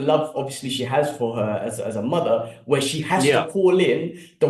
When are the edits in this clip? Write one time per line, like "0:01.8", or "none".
none